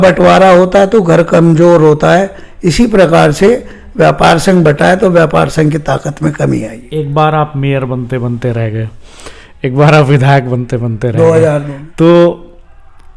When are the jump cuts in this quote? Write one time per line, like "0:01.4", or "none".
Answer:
0:06.8
0:11.8